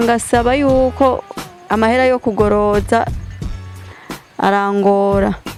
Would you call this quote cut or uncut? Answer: uncut